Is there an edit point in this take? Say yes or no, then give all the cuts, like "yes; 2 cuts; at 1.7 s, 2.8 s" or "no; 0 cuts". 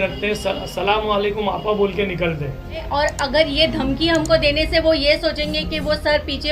yes; 1 cut; at 2.9 s